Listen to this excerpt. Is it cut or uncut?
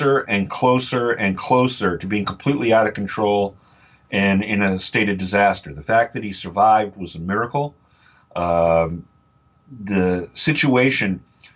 uncut